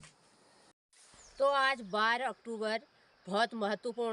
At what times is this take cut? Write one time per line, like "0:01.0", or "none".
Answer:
0:00.9